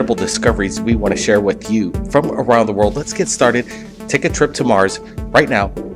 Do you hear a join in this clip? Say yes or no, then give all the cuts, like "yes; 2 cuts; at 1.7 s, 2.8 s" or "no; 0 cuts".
no; 0 cuts